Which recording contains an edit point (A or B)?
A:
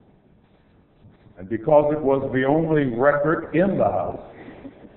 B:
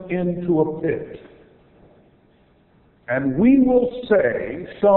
A